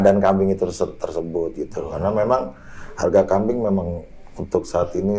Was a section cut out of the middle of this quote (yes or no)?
no